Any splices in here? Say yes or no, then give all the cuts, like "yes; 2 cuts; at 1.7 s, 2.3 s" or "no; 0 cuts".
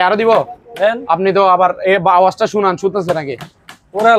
no; 0 cuts